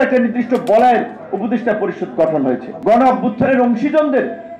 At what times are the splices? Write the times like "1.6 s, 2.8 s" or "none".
2.7 s